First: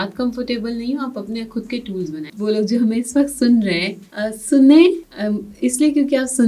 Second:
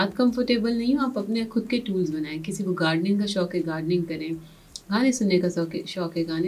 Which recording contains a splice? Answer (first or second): first